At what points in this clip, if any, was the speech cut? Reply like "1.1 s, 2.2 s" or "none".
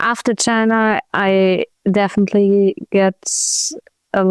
1.7 s